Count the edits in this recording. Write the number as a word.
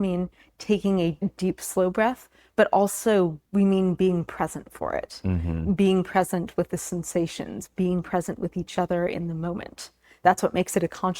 two